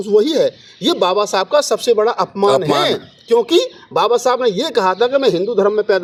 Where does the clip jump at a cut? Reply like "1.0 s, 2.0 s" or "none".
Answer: none